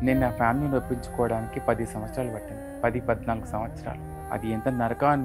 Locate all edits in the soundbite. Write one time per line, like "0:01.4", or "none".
none